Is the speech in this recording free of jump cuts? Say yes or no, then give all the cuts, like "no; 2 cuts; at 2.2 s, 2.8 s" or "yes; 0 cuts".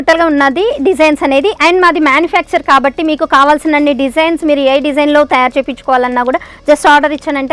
yes; 0 cuts